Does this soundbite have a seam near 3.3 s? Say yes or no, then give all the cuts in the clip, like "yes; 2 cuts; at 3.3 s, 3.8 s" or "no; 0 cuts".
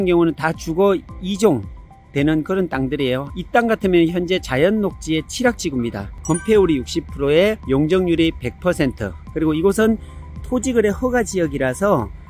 yes; 2 cuts; at 3.3 s, 6.1 s